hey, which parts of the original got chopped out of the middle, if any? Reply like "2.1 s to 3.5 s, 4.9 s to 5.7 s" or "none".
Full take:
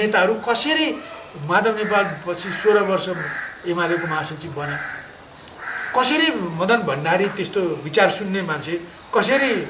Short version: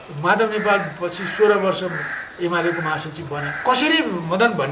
4.8 s to 5.8 s